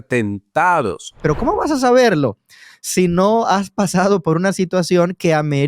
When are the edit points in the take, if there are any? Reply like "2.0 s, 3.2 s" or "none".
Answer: 1.2 s